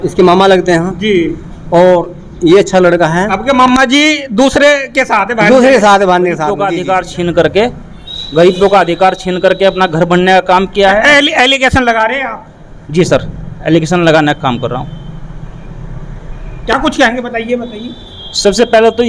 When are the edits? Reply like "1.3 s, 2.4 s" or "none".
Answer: 6.5 s

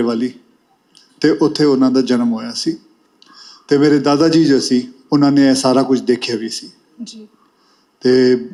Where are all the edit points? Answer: none

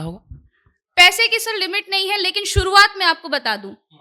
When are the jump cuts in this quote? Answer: none

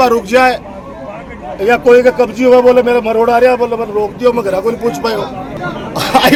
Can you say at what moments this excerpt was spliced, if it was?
none

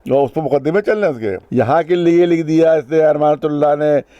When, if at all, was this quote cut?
1.3 s

